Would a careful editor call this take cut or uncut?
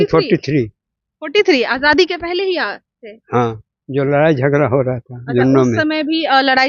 uncut